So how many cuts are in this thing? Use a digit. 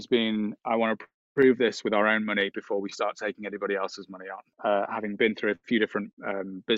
1